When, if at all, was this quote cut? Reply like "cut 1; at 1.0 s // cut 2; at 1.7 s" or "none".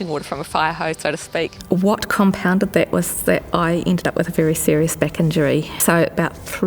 cut 1; at 1.6 s // cut 2; at 5.7 s